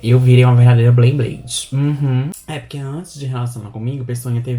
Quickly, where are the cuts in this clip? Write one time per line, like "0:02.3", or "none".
0:02.3

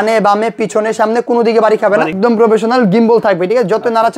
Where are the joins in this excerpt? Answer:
0:02.1

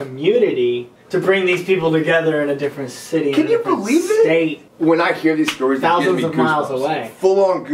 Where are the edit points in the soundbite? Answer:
0:00.9
0:04.6

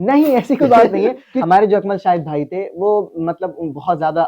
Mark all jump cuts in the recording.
0:01.3

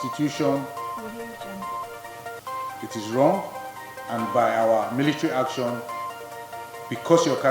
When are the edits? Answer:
0:01.1
0:02.9

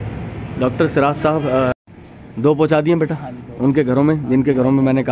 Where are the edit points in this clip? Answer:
0:01.8

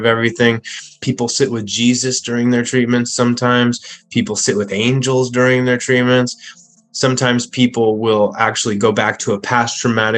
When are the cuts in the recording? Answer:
0:01.0

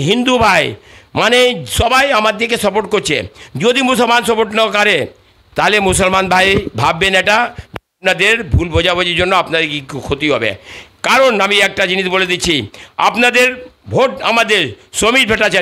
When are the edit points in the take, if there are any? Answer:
none

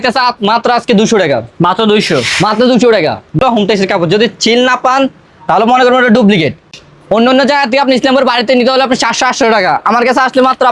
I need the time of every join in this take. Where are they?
0:03.4
0:06.7

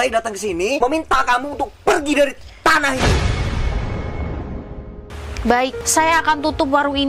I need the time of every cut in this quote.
0:00.8
0:05.0
0:05.8

